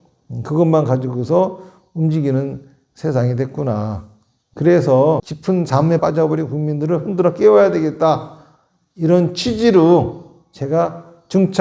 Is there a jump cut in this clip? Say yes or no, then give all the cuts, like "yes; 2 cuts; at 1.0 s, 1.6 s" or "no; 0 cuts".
yes; 1 cut; at 5.3 s